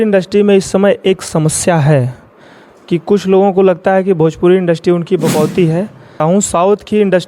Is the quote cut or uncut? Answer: cut